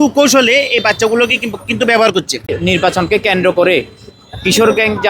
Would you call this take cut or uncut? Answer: cut